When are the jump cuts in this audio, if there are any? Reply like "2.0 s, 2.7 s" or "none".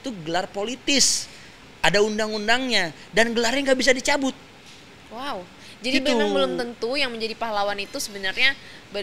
none